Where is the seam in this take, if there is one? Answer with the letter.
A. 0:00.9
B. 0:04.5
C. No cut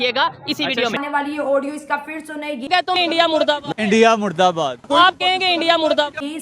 A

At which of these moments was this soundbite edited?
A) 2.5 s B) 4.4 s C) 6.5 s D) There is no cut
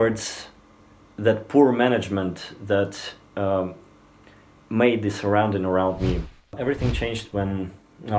C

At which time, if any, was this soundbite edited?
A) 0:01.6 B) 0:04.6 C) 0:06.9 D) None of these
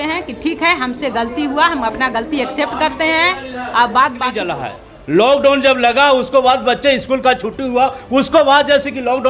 B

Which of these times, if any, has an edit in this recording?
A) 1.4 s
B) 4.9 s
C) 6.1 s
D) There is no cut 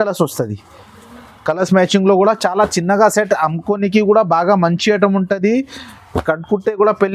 D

